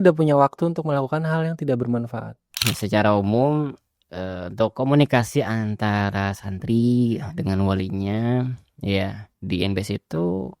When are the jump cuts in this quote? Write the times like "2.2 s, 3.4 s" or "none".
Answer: 2.7 s